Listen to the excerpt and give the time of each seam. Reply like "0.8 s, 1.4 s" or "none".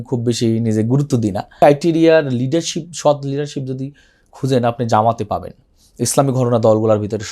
1.6 s